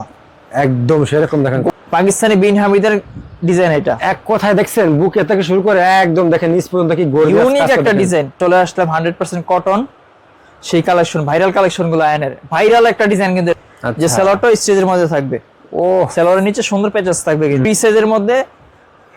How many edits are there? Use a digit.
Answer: 4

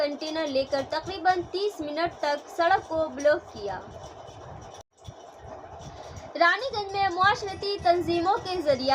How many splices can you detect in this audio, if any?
1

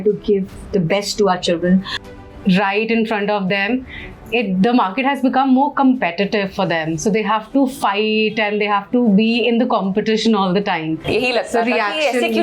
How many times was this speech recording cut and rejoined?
2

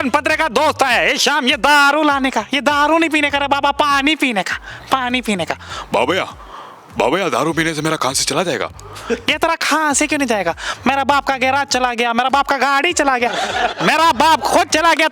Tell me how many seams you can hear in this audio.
0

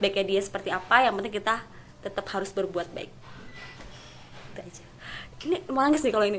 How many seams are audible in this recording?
0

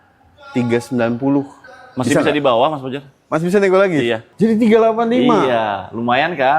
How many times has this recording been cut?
1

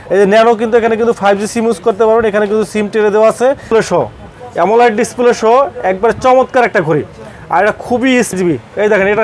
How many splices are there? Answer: 2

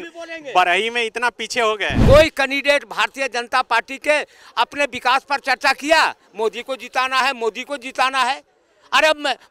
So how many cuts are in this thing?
1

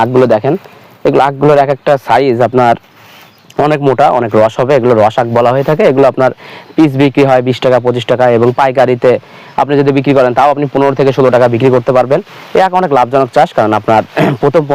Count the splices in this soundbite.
0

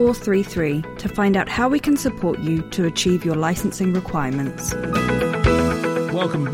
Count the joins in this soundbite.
1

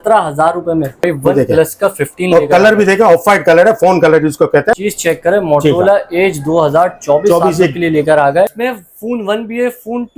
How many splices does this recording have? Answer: 3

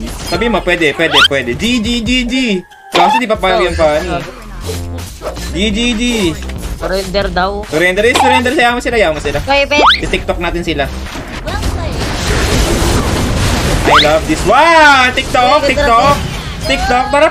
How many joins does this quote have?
0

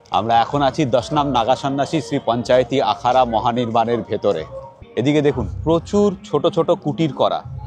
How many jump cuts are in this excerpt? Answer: 1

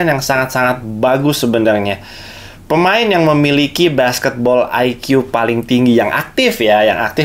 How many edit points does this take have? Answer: 0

